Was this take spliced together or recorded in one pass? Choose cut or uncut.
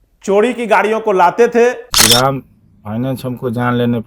cut